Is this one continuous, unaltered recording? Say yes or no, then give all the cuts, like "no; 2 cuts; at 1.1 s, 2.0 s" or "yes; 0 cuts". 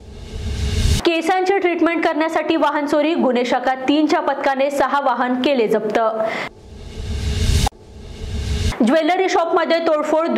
no; 1 cut; at 0.9 s